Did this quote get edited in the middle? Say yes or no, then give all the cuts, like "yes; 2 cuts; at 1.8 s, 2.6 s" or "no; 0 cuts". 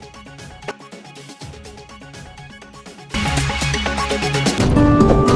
no; 0 cuts